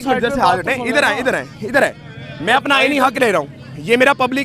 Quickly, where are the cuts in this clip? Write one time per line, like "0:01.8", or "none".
none